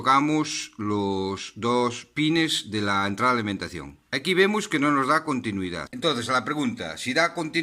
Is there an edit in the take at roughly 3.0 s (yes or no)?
no